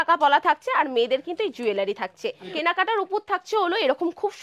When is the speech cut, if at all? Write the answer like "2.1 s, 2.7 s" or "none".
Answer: 2.5 s

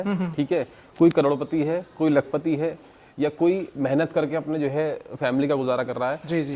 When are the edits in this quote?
none

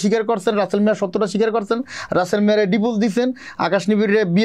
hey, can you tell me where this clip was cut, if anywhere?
none

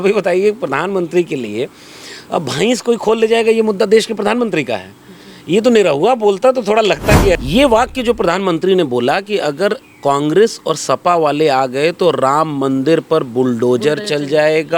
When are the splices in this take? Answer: 7.4 s

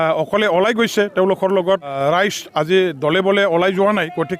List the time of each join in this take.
2.0 s

